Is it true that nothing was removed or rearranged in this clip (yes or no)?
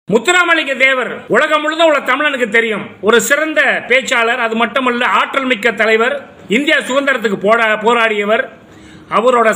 no